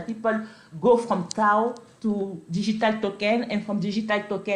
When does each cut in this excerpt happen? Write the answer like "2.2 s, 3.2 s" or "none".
none

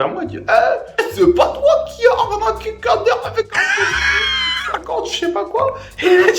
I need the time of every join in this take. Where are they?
none

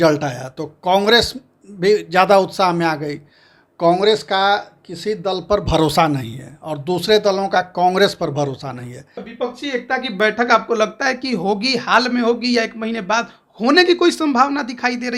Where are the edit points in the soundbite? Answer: 9.2 s

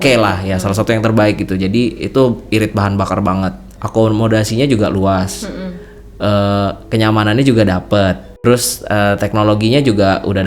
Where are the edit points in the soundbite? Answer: 3.8 s, 8.3 s

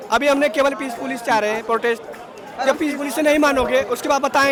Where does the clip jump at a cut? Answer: none

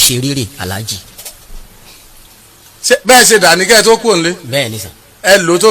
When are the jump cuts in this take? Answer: 2.2 s

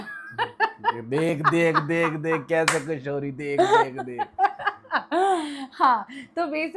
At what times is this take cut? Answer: none

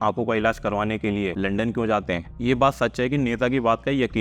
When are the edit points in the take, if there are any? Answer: 1.3 s, 2.3 s

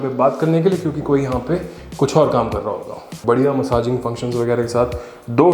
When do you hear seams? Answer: 3.1 s

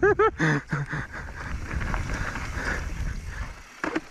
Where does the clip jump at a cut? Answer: none

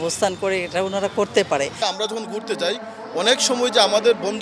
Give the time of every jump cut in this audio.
1.8 s

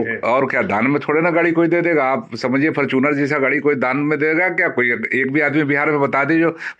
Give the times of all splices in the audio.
none

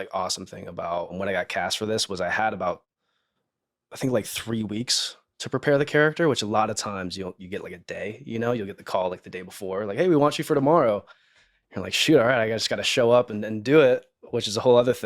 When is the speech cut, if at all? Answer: 1.1 s

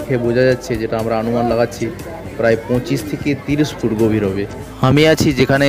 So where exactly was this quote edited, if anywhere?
4.6 s

